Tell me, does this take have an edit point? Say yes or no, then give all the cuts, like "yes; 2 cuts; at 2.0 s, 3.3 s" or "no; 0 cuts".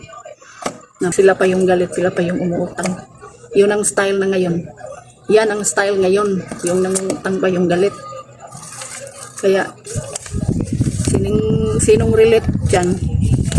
yes; 1 cut; at 1.1 s